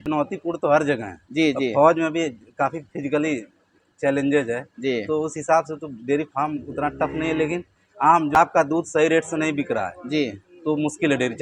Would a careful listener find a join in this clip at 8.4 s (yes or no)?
yes